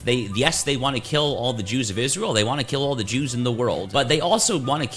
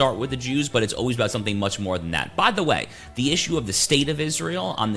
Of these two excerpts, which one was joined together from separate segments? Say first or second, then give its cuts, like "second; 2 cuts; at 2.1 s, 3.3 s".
first; 1 cut; at 3.8 s